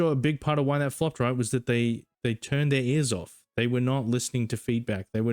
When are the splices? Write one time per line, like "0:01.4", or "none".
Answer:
0:02.1